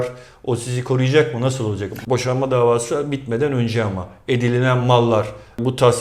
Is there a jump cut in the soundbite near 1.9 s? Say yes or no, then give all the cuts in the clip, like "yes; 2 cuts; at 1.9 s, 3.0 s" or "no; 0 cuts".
yes; 1 cut; at 1.9 s